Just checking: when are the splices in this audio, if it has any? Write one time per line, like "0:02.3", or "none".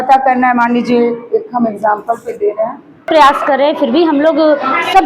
0:03.1